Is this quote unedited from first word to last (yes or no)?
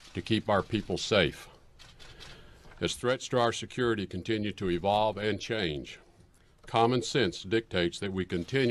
no